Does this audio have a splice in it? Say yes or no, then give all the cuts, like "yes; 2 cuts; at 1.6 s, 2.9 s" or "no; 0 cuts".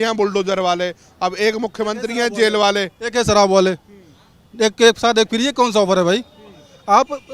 no; 0 cuts